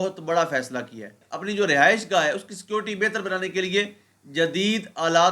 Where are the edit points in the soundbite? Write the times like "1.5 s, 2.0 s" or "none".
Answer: 1.3 s